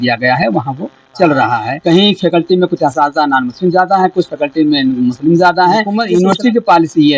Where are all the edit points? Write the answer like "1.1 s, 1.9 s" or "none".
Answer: 1.7 s, 5.9 s